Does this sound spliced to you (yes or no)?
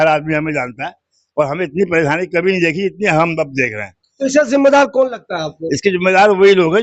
no